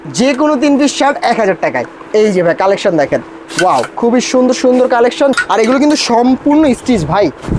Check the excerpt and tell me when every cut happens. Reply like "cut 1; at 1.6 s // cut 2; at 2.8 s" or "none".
cut 1; at 1.9 s // cut 2; at 5.4 s